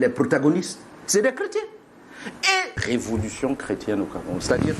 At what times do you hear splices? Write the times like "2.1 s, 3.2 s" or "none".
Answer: 2.8 s